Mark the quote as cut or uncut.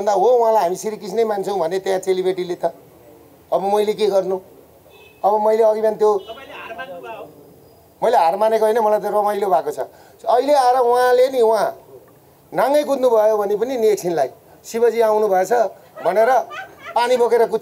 uncut